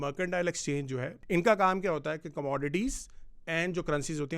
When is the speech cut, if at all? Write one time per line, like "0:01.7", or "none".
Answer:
0:01.1